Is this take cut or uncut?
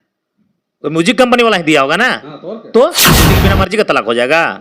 cut